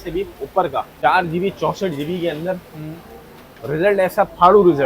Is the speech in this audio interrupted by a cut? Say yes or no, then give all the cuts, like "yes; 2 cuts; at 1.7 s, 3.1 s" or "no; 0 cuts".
yes; 1 cut; at 0.9 s